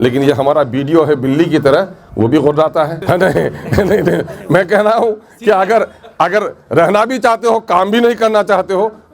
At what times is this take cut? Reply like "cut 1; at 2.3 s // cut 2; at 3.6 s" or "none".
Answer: cut 1; at 3.0 s